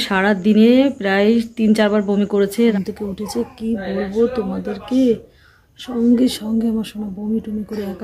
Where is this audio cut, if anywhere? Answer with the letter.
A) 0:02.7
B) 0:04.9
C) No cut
A